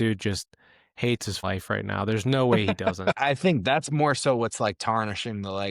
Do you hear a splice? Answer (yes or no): yes